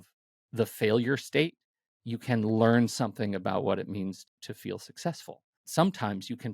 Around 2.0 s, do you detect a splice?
no; 2 cuts; at 4.2 s, 5.6 s

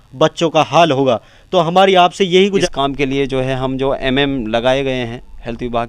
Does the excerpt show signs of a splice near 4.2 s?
no; 1 cut; at 2.5 s

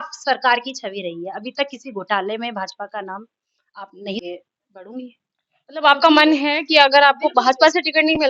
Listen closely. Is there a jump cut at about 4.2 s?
yes; 1 cut; at 4.2 s

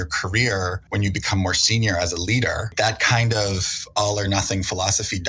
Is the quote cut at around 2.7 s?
yes; 2 cuts; at 0.8 s, 2.7 s

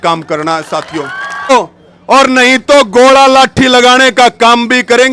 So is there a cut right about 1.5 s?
yes; 1 cut; at 1.5 s

